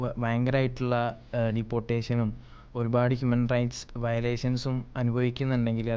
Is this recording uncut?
yes; 0 cuts

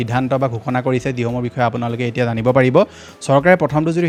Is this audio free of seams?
yes; 0 cuts

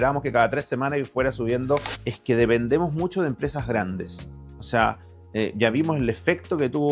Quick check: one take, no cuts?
no; 1 cut; at 2.0 s

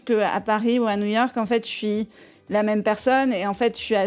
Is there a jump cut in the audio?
no; 0 cuts

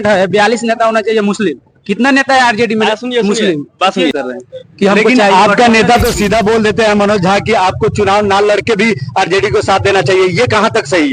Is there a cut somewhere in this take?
yes; 1 cut; at 4.2 s

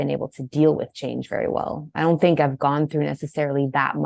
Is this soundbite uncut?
yes; 0 cuts

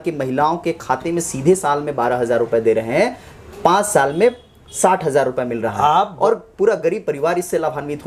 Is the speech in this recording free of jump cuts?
yes; 0 cuts

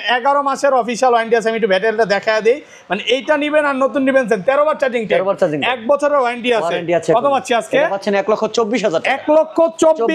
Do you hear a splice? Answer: no; 0 cuts

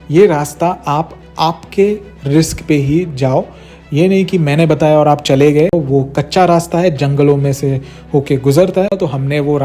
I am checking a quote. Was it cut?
yes; 2 cuts; at 5.7 s, 8.9 s

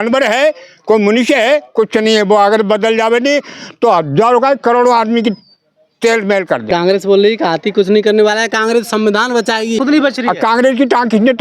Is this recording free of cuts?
no; 2 cuts; at 6.7 s, 9.8 s

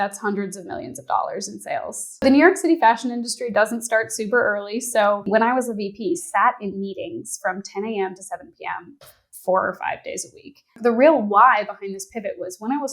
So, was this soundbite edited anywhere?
yes; 3 cuts; at 2.2 s, 5.2 s, 10.7 s

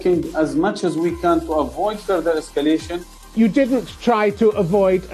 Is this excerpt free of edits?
no; 1 cut; at 3.2 s

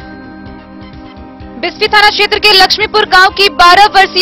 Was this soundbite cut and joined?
yes; 1 cut; at 1.5 s

